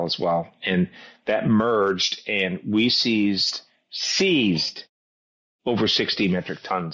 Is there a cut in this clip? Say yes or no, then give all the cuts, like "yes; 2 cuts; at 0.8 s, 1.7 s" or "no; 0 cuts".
no; 0 cuts